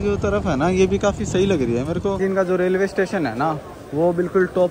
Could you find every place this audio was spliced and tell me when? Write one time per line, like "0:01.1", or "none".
0:02.2